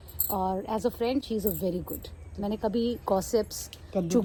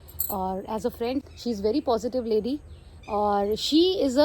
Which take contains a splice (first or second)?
second